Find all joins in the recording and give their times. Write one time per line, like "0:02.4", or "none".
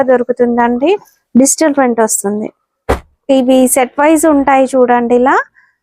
0:01.1